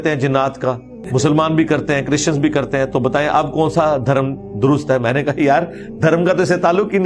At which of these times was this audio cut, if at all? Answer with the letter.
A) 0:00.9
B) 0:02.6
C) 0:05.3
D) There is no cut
A